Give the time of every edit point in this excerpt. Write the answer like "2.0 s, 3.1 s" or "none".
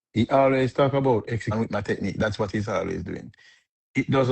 1.5 s

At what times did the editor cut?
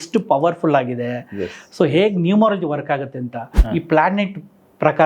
3.5 s

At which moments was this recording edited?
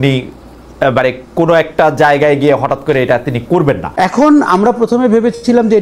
3.9 s

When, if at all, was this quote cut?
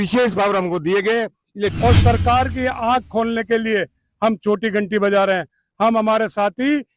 1.8 s

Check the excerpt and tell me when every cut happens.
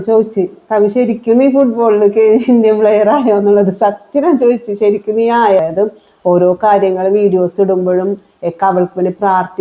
5.6 s

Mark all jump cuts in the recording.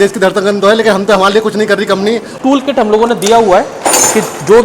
2.3 s

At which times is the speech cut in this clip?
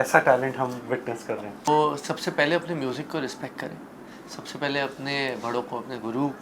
1.7 s

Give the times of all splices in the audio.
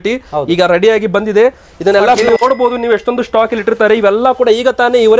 2.2 s

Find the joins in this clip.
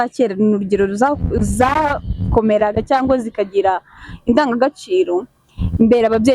1.8 s

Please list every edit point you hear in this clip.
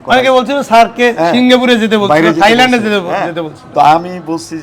none

